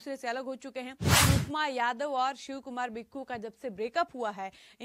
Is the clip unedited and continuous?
no; 1 cut; at 1.0 s

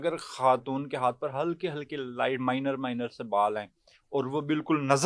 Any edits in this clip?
no; 0 cuts

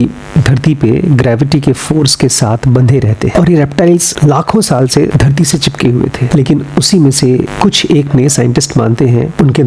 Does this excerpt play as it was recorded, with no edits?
no; 2 cuts; at 3.3 s, 6.2 s

